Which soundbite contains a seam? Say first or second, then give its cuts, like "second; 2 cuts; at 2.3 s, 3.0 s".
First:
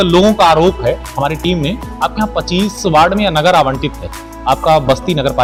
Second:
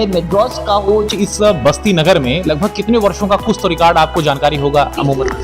second; 1 cut; at 1.1 s